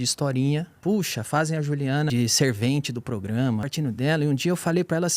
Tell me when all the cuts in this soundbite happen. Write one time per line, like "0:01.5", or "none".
0:00.8
0:02.1
0:03.6